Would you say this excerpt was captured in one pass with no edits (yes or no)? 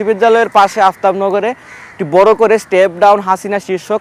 yes